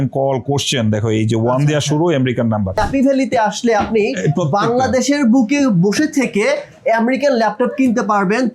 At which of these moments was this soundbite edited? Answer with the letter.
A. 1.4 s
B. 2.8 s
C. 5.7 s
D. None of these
B